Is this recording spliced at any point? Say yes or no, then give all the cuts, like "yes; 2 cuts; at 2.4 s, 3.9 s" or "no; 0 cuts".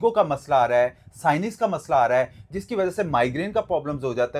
no; 0 cuts